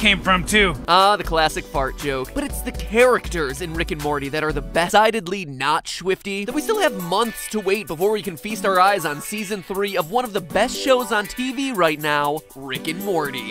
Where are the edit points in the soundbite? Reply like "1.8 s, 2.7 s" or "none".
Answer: none